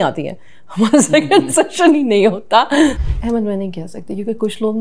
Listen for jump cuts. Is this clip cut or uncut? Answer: cut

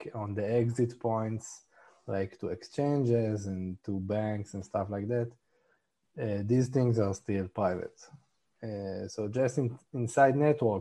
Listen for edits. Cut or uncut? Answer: uncut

